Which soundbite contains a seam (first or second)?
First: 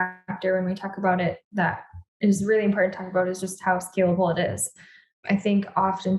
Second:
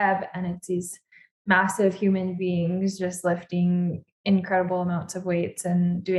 first